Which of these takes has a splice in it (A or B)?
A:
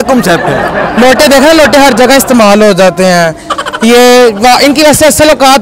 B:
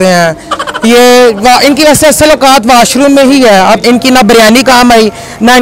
B